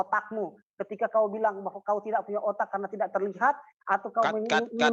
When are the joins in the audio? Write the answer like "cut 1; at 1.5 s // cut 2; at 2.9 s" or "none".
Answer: none